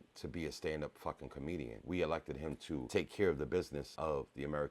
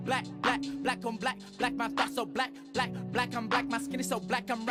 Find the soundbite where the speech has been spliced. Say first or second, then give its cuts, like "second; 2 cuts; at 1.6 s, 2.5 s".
first; 3 cuts; at 1.8 s, 2.9 s, 3.9 s